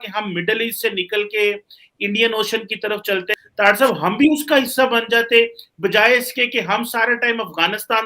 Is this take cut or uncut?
cut